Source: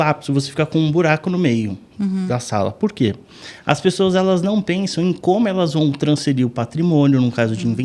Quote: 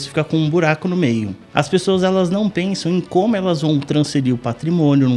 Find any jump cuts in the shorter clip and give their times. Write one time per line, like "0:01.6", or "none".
0:01.4